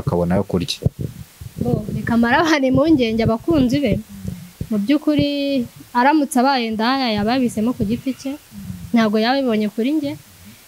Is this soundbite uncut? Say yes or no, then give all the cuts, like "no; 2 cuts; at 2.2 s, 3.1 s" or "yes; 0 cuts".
yes; 0 cuts